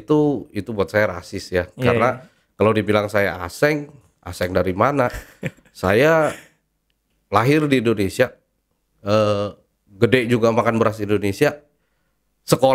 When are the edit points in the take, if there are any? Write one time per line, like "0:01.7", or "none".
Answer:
none